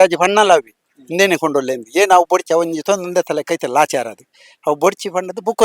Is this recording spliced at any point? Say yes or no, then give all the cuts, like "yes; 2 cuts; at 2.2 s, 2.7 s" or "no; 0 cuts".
no; 0 cuts